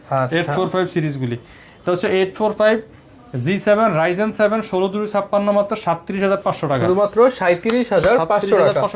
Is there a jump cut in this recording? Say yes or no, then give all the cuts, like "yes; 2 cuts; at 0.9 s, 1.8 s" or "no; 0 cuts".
no; 0 cuts